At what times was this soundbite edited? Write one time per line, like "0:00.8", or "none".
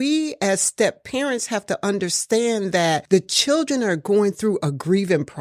none